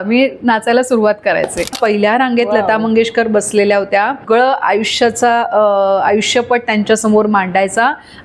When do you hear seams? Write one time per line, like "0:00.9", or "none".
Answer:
0:01.8
0:04.2